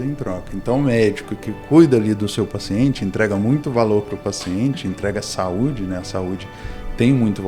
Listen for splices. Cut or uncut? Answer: uncut